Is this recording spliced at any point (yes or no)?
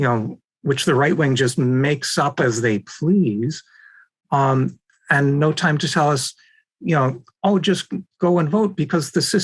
no